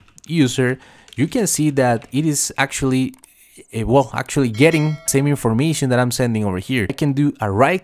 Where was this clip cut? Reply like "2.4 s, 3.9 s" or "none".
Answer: 5.0 s, 6.9 s